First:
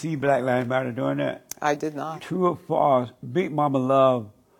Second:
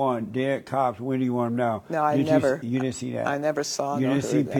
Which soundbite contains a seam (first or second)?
first